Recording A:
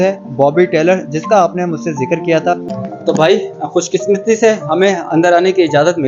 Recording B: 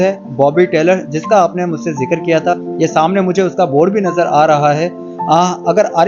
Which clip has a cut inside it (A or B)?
A